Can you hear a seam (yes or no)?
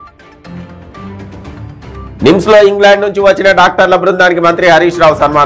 no